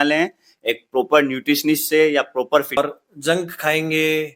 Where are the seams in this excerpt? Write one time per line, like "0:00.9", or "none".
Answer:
0:02.8